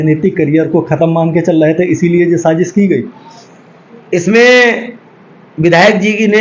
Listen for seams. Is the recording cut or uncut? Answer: cut